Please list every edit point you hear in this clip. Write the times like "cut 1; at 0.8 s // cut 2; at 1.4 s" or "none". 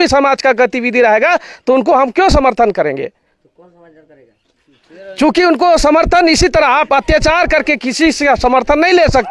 none